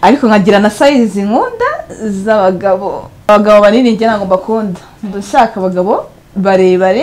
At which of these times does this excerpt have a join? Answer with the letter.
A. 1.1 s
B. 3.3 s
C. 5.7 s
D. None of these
B